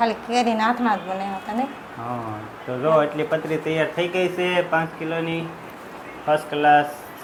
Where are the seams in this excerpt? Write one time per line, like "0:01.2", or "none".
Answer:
none